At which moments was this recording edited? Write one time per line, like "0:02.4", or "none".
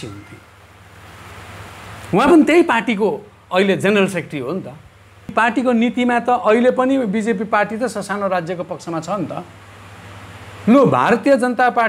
0:05.3